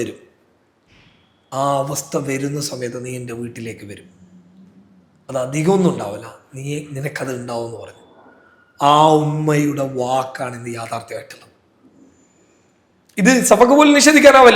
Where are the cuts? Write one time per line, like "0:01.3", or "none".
none